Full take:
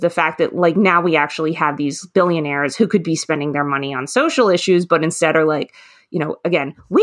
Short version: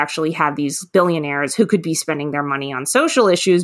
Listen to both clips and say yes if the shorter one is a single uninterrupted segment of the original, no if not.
yes